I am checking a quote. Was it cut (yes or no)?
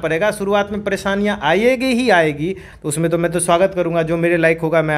yes